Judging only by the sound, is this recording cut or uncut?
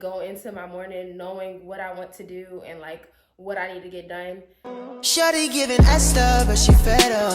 cut